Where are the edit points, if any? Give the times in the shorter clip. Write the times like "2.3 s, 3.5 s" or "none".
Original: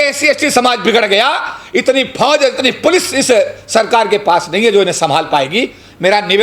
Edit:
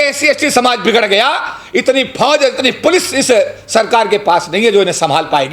none